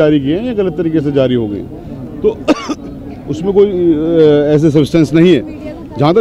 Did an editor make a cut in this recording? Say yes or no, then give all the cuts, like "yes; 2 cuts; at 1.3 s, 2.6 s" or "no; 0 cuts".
no; 0 cuts